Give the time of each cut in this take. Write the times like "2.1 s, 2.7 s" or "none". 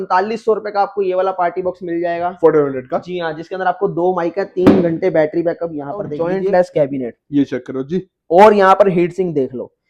6.1 s